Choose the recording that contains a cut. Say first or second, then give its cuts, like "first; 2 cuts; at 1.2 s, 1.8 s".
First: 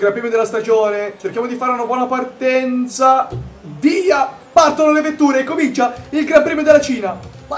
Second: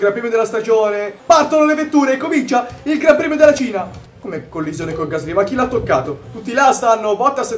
second; 3 cuts; at 1.1 s, 3.7 s, 6.1 s